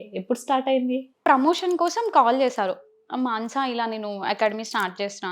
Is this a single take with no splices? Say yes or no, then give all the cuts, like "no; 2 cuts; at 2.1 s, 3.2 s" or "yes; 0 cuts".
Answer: no; 1 cut; at 1.2 s